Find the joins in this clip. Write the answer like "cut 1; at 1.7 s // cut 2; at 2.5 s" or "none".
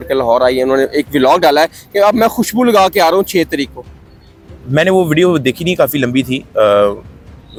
none

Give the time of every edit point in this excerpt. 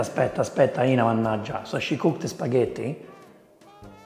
none

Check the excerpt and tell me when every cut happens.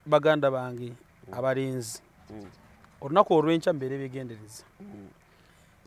none

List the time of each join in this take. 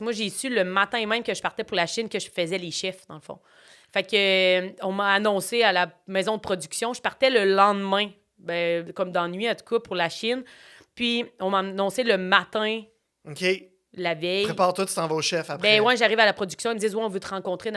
none

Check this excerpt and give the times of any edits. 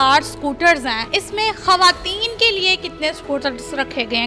cut 1; at 1.0 s

